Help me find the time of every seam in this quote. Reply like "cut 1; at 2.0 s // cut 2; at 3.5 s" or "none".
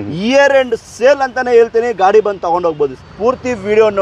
cut 1; at 3.0 s